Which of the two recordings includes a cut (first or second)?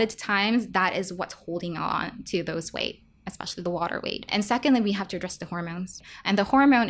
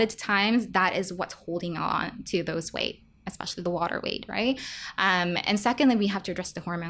first